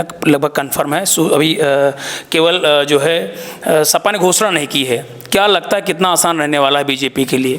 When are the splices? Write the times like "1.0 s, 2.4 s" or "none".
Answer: none